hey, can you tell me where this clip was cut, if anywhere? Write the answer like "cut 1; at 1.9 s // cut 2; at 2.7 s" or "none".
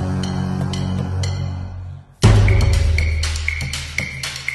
none